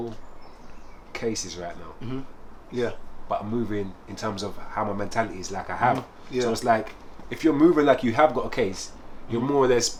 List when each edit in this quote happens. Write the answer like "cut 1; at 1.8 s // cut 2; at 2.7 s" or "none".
none